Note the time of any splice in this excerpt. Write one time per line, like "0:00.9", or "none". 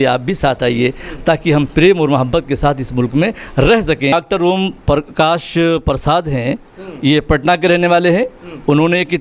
0:04.1

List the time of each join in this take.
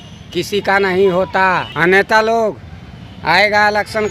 0:01.7

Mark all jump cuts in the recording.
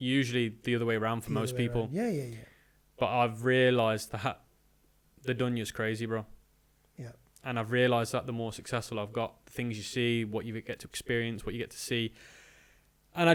none

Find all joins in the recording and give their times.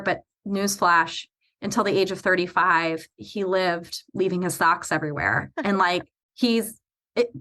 0:06.2

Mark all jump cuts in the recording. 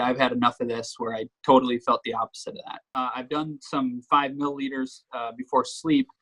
0:03.0

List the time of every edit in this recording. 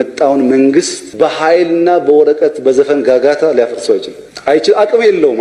none

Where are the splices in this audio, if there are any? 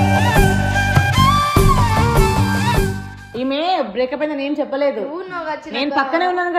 none

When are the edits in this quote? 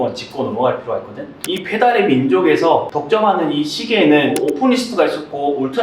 0:01.4

